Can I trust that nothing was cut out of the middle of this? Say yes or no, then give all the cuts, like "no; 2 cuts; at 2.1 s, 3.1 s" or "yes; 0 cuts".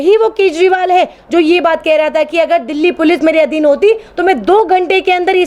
yes; 0 cuts